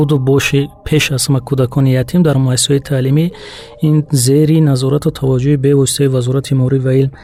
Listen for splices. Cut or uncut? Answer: uncut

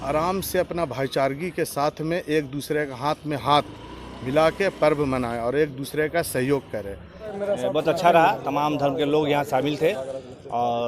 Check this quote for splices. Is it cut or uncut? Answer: cut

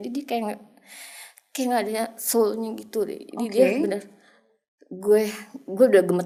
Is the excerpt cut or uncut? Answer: uncut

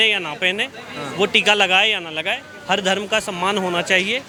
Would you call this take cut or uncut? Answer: uncut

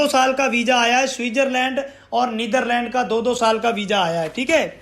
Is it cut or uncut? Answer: uncut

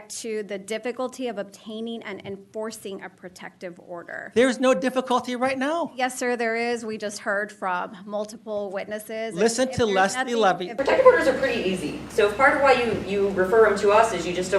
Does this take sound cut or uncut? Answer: cut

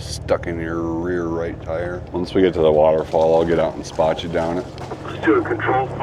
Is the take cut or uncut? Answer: cut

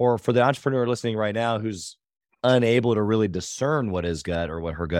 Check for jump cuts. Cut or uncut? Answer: uncut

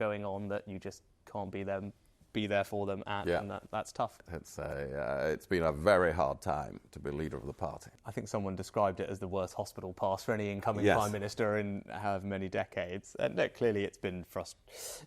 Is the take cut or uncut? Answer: cut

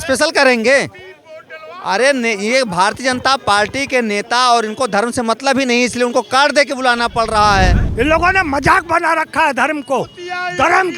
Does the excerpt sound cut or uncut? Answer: cut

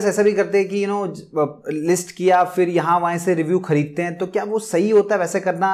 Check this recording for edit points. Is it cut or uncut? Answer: uncut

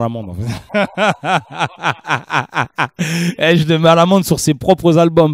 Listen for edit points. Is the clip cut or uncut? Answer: uncut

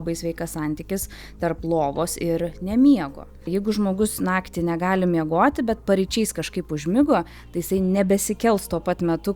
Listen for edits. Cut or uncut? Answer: cut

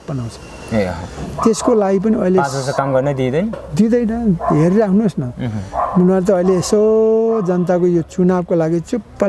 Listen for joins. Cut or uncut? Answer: uncut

